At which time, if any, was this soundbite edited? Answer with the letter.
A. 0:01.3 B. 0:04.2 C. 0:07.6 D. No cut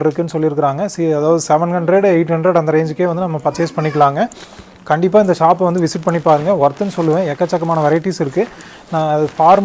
D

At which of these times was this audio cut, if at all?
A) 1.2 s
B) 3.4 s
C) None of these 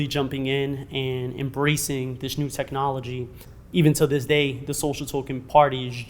B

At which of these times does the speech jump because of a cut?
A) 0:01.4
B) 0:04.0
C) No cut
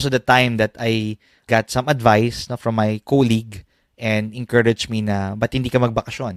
A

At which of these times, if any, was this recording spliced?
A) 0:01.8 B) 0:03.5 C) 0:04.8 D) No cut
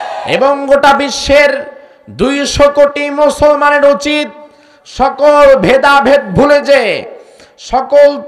D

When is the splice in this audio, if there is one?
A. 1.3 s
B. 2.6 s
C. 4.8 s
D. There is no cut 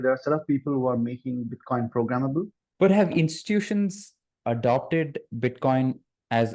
B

